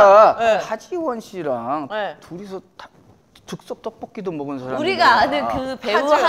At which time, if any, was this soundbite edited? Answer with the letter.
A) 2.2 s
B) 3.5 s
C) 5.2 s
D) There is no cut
D